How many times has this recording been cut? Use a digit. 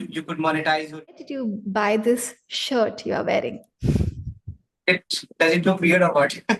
1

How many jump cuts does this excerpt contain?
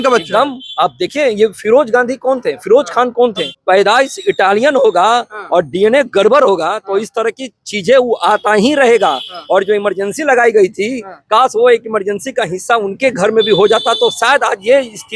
1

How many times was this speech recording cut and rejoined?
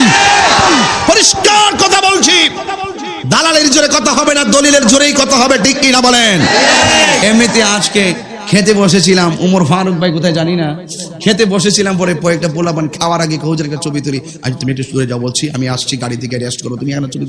1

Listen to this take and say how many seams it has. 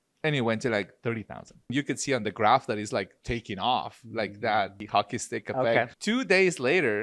3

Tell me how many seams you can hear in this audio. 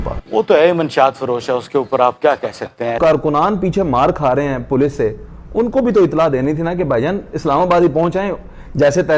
1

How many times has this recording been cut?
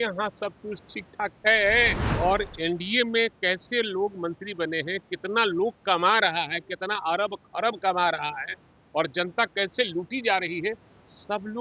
1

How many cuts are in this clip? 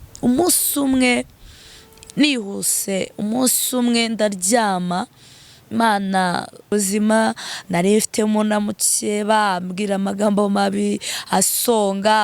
1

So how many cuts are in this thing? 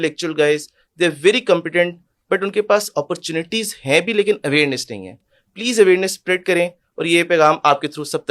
0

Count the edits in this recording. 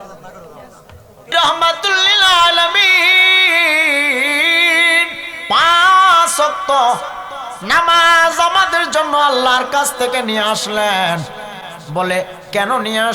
1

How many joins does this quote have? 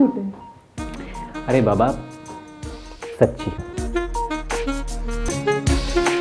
1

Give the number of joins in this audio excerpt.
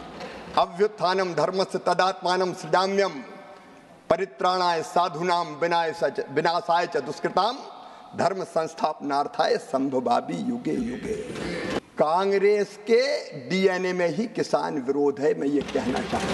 1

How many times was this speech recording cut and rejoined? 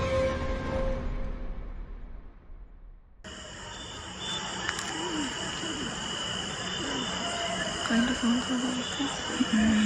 1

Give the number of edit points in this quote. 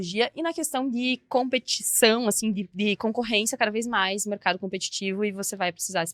0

